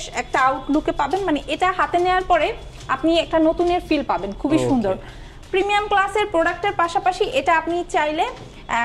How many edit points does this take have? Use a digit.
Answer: 0